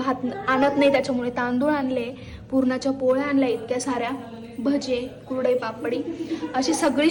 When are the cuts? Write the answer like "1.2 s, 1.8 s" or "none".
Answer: none